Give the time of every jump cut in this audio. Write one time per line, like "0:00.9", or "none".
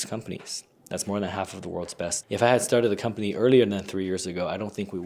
0:02.1